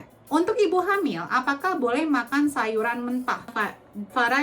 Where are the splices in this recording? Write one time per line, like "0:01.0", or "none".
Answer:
0:03.5